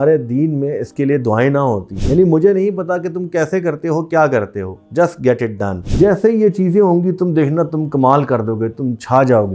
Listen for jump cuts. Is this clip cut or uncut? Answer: cut